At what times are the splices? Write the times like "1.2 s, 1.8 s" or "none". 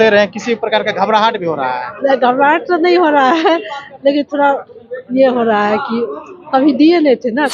none